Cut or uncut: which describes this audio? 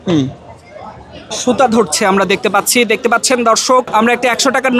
cut